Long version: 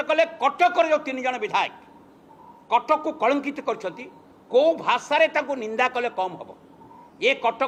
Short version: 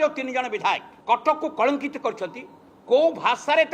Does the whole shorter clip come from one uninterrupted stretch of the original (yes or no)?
no